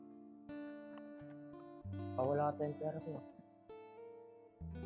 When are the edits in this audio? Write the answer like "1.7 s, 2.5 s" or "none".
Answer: 2.2 s, 3.2 s